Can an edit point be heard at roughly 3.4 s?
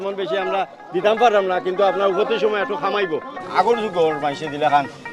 yes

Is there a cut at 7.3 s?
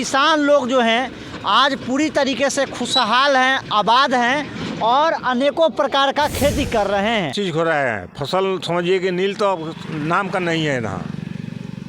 yes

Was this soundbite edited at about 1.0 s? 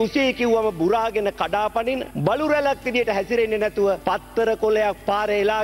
no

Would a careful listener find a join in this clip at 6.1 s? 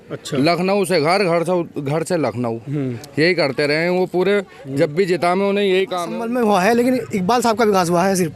yes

